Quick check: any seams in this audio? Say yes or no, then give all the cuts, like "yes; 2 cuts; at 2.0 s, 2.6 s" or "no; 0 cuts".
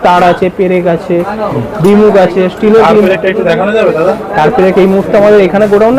no; 0 cuts